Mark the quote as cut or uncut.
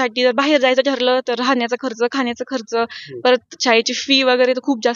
uncut